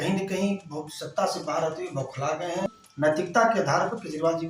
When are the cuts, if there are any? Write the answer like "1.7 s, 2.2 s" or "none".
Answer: 2.7 s